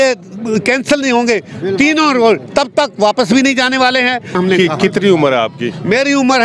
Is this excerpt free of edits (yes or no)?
no